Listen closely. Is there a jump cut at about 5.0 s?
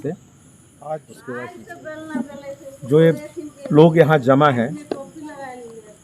no; 1 cut; at 1.2 s

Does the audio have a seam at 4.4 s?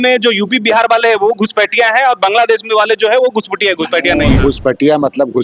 yes; 1 cut; at 4.4 s

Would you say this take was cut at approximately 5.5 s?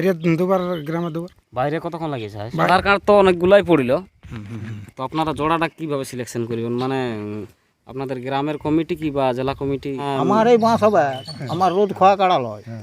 no; 2 cuts; at 2.7 s, 10.0 s

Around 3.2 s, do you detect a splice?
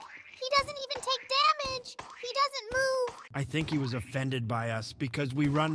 yes; 1 cut; at 3.2 s

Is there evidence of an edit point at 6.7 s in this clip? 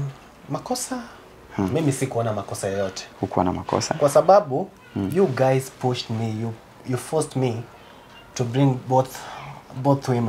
no; 0 cuts

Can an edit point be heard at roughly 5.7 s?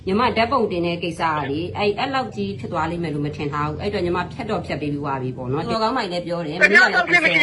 yes; 1 cut; at 5.7 s

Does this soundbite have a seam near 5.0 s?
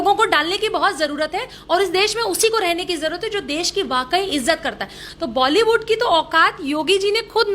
yes; 1 cut; at 5.0 s

